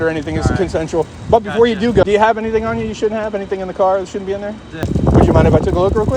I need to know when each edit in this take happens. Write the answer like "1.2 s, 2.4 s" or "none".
2.0 s, 4.8 s